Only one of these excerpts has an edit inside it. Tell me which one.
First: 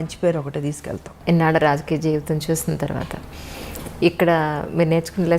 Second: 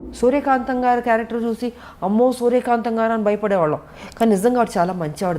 first; 1 cut; at 1.1 s

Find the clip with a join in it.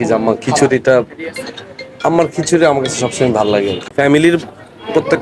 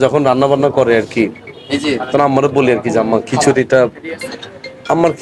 first; 1 cut; at 3.8 s

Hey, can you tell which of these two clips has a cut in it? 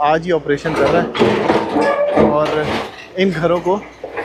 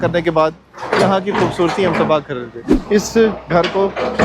second; 1 cut; at 2.6 s

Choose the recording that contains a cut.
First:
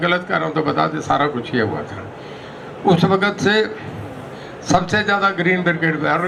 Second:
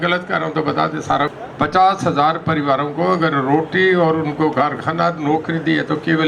second; 1 cut; at 1.4 s

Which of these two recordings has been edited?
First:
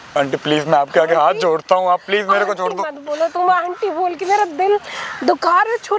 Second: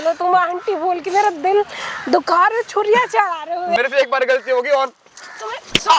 second; 1 cut; at 3.8 s

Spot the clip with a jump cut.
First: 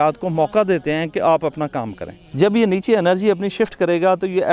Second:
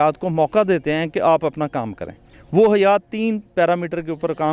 first; 1 cut; at 2.2 s

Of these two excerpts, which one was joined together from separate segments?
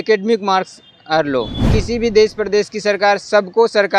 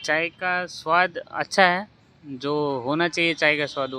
first; 1 cut; at 1.7 s

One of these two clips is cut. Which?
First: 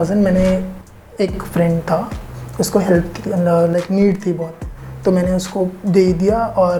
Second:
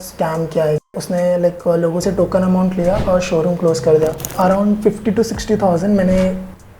second; 2 cuts; at 1.0 s, 4.3 s

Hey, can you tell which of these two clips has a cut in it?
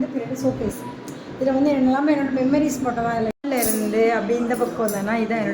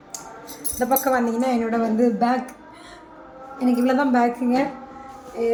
first; 1 cut; at 3.3 s

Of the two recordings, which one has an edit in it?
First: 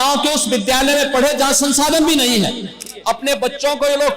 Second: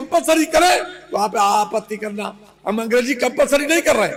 first; 1 cut; at 2.8 s

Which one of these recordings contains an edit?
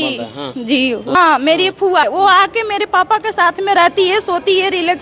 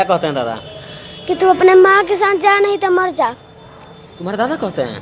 first; 2 cuts; at 1.1 s, 2.0 s

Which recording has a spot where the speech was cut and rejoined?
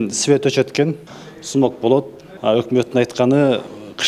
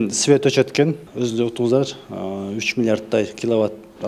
first; 2 cuts; at 1.0 s, 2.2 s

